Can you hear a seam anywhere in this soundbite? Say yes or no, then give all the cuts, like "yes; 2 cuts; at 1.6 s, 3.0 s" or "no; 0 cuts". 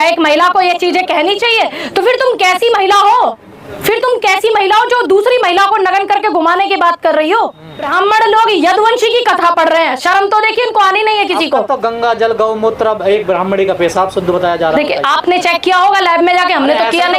yes; 1 cut; at 7.9 s